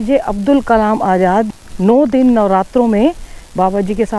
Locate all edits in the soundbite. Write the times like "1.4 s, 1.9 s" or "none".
none